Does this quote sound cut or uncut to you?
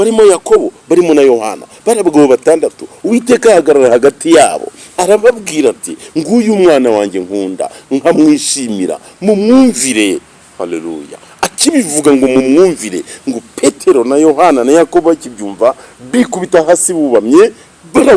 uncut